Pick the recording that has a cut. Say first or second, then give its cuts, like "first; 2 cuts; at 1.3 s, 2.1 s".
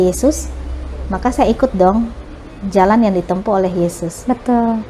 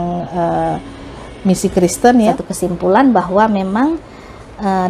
second; 1 cut; at 2.3 s